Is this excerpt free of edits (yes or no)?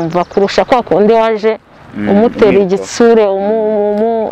yes